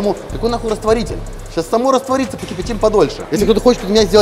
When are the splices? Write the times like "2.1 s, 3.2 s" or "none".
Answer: 3.2 s